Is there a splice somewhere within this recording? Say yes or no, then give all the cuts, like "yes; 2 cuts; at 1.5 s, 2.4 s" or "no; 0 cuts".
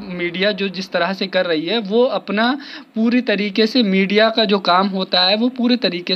no; 0 cuts